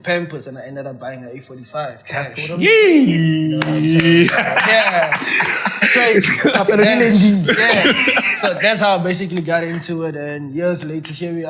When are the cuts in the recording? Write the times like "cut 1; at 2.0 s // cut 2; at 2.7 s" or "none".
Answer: none